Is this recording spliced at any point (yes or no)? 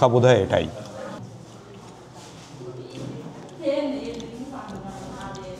yes